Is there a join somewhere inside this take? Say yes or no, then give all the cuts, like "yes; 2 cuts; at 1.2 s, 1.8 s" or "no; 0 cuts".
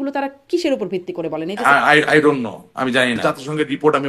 yes; 2 cuts; at 1.5 s, 3.2 s